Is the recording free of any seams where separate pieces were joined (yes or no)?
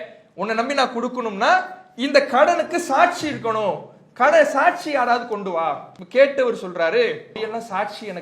no